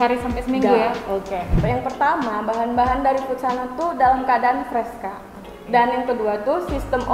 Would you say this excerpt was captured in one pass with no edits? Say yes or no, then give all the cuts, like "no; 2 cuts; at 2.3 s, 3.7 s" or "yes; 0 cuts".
no; 1 cut; at 1.5 s